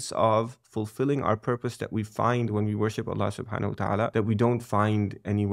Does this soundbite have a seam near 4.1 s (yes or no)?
yes